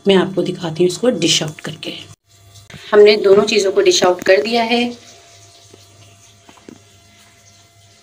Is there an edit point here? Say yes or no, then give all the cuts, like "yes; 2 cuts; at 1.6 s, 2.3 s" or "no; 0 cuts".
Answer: yes; 1 cut; at 2.7 s